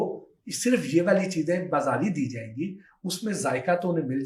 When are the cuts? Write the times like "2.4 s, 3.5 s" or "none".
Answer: none